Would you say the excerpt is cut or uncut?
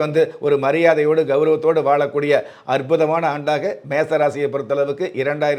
uncut